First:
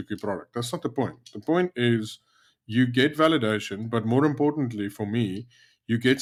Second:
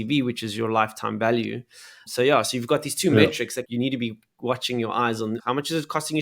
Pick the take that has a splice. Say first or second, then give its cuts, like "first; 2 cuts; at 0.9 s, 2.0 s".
second; 3 cuts; at 2.0 s, 3.6 s, 5.4 s